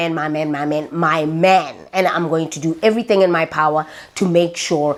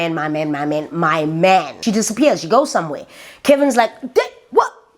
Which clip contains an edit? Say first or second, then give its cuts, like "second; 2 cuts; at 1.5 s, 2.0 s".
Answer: second; 1 cut; at 1.7 s